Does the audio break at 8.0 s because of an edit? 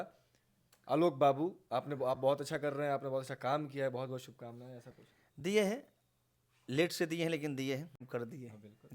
yes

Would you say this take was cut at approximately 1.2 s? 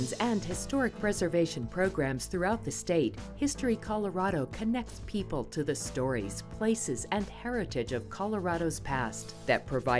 no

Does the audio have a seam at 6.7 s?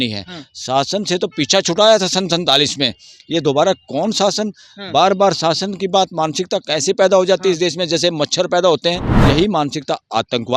no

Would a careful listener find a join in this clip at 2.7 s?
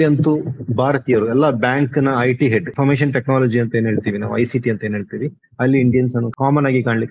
yes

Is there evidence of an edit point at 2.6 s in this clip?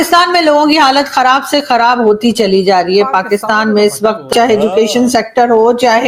no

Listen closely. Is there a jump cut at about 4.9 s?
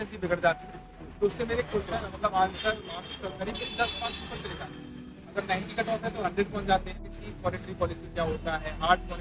no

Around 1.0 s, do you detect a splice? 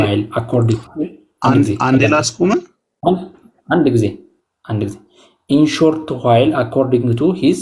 no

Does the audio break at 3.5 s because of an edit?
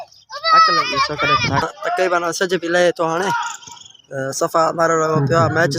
no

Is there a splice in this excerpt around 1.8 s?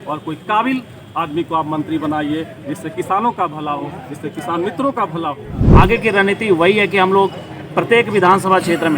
no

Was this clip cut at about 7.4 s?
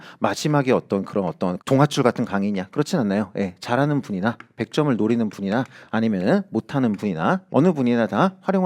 yes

